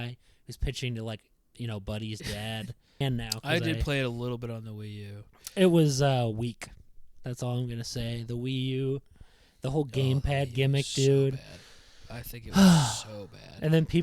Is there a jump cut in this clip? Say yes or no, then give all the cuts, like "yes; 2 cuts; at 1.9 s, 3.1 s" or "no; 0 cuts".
yes; 1 cut; at 3.0 s